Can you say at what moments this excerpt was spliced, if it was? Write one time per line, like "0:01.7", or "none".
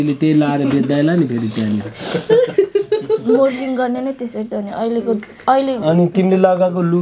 none